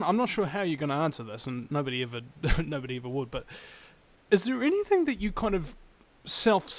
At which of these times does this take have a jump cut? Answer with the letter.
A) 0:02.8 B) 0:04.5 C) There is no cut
B